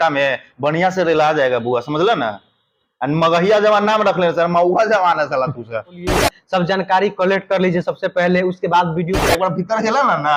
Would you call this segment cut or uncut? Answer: cut